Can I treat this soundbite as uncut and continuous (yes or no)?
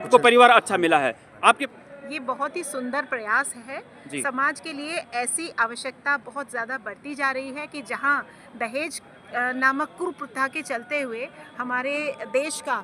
no